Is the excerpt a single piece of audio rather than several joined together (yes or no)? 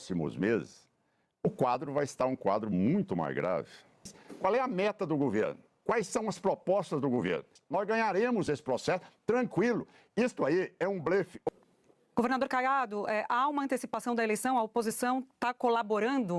no